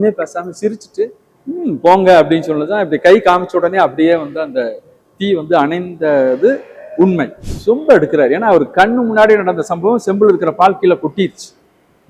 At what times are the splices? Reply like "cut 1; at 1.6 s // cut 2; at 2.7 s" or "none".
cut 1; at 1.3 s // cut 2; at 7.4 s